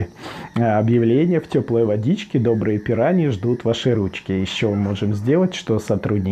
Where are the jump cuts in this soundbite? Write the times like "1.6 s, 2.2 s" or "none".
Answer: none

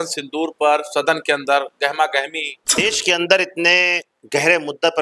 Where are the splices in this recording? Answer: 2.8 s

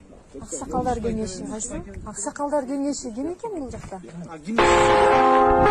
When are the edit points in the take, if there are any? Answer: 1.0 s

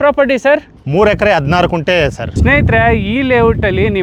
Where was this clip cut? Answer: none

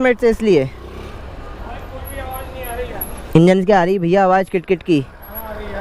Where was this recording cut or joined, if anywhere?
1.4 s

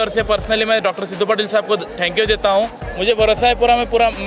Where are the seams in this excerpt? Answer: 2.8 s

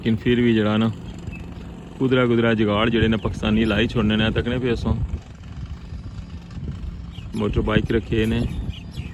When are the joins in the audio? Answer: none

